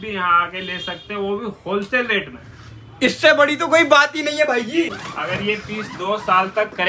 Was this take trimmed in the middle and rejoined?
yes; 1 cut; at 5.1 s

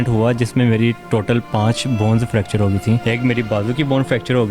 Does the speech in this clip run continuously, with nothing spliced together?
no; 1 cut; at 3.0 s

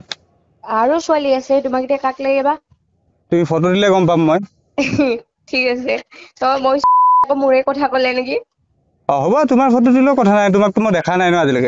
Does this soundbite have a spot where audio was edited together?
yes; 1 cut; at 7.1 s

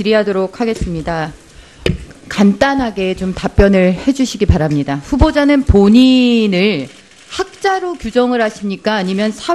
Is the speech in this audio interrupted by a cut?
no; 0 cuts

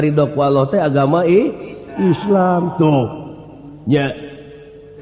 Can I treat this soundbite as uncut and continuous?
yes; 0 cuts

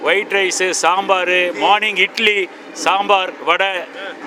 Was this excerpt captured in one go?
yes; 0 cuts

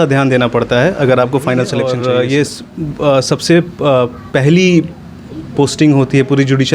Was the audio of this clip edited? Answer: yes; 1 cut; at 1.8 s

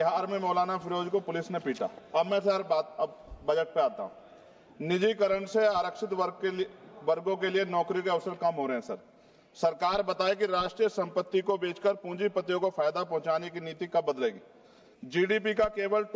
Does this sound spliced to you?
no; 0 cuts

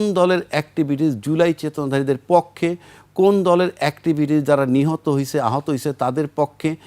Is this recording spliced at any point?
no; 0 cuts

